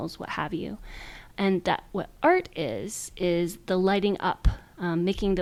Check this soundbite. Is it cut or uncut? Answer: uncut